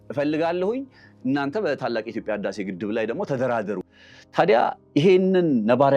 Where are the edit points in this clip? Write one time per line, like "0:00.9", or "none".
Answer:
0:03.8